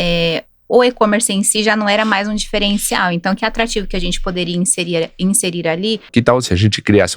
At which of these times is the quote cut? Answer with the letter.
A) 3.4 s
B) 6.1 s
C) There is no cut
B